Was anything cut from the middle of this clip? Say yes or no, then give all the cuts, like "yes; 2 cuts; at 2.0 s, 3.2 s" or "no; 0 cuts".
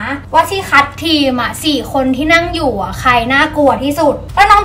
no; 0 cuts